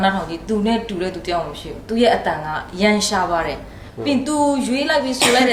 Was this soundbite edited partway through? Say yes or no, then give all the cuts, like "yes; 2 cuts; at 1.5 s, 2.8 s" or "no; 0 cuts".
no; 0 cuts